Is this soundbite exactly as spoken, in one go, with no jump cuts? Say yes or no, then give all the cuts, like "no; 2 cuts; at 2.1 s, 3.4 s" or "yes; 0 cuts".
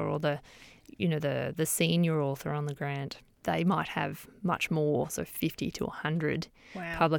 no; 1 cut; at 3.4 s